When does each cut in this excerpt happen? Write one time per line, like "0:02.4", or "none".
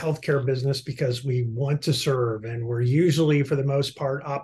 none